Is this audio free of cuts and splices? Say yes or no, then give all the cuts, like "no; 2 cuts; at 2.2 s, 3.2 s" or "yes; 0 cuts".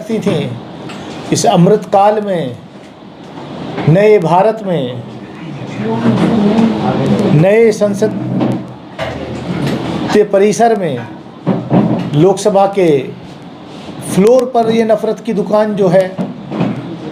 yes; 0 cuts